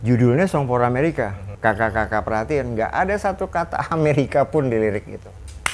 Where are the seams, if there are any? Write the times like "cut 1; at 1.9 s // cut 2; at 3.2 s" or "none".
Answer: cut 1; at 1.4 s